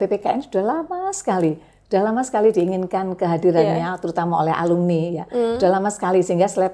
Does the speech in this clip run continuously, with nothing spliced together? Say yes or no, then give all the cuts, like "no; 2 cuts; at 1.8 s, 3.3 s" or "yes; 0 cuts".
yes; 0 cuts